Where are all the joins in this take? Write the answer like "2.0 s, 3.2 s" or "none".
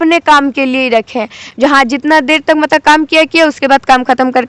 none